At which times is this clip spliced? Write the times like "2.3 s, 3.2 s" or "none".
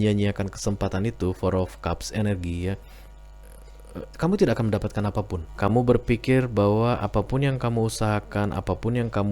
5.4 s